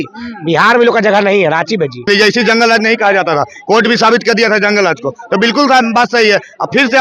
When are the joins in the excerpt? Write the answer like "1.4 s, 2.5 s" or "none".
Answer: 2.0 s